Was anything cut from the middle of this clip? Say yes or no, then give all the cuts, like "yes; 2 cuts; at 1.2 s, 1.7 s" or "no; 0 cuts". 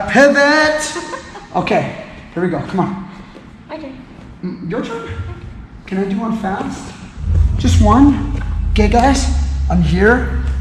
yes; 1 cut; at 1.7 s